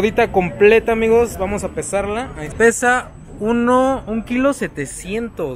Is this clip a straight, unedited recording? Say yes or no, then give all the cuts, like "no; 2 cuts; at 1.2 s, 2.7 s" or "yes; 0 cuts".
no; 1 cut; at 2.5 s